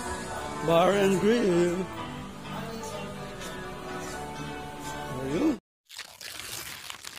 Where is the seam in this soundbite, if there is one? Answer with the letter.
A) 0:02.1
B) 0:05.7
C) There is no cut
B